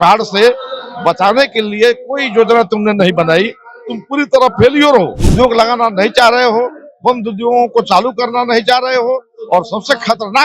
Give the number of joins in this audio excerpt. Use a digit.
1